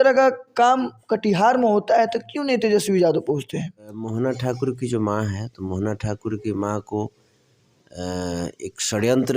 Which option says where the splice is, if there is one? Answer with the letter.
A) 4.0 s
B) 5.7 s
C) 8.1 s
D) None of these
A